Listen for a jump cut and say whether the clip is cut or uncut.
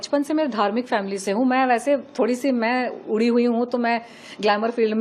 uncut